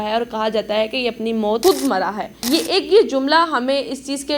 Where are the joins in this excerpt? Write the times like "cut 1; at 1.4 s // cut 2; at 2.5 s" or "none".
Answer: cut 1; at 1.6 s // cut 2; at 2.3 s

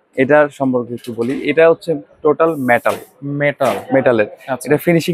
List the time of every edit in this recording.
none

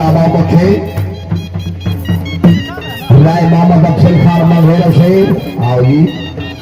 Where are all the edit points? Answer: none

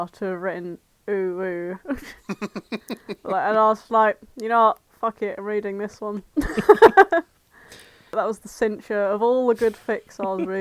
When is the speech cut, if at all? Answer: cut 1; at 8.1 s

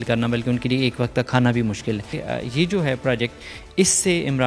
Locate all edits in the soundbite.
cut 1; at 2.2 s

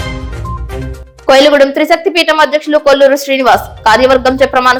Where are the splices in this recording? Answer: none

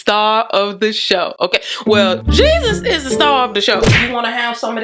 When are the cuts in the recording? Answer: cut 1; at 3.9 s

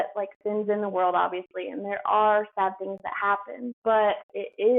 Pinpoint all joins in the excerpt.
cut 1; at 3.9 s

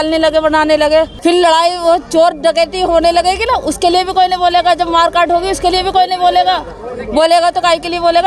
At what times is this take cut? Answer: cut 1; at 1.1 s

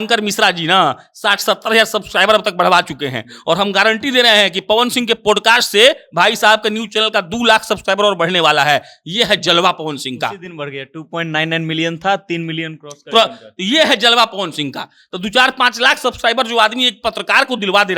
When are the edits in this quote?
none

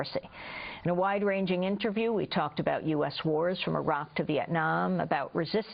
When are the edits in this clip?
none

